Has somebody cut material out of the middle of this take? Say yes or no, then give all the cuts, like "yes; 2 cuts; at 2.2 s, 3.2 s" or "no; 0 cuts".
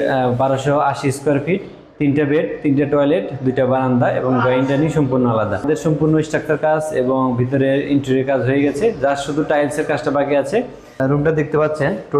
yes; 2 cuts; at 5.6 s, 11.0 s